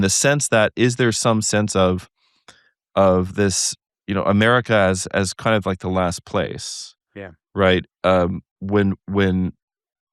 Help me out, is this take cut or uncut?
uncut